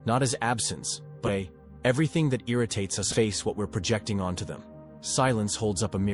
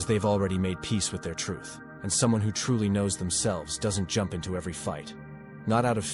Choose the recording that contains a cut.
first; 2 cuts; at 1.3 s, 3.0 s

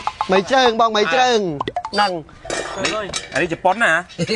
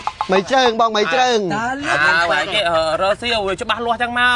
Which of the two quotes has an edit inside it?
second; 1 cut; at 1.6 s

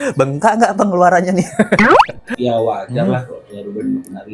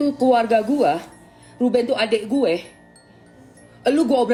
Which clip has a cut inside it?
first; 1 cut; at 2.2 s

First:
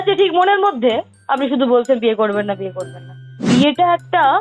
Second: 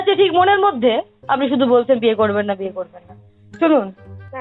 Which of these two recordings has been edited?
first; 1 cut; at 3.4 s

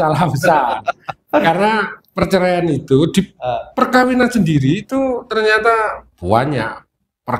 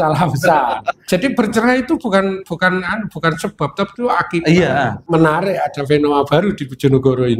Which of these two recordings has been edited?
second; 2 cuts; at 1.0 s, 5.0 s

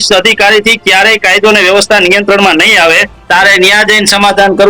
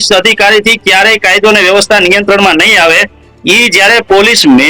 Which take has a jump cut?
first; 1 cut; at 3.1 s

